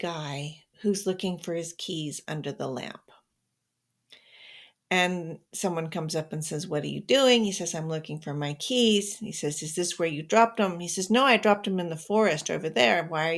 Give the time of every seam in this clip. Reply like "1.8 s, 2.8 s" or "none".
none